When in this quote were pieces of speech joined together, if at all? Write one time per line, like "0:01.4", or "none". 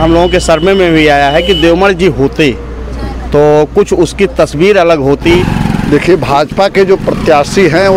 0:05.4